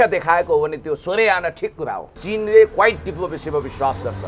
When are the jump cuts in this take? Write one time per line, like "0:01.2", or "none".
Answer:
0:02.1